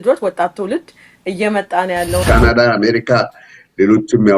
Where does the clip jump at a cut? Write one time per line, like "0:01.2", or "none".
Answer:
0:02.2

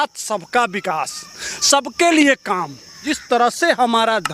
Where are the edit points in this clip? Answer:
0:03.1

